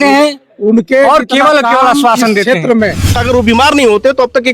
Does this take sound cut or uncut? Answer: cut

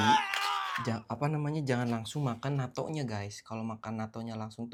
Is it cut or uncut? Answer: uncut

